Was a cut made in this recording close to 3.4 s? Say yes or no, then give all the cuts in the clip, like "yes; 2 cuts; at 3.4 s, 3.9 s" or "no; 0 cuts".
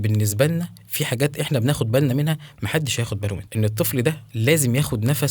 yes; 1 cut; at 3.4 s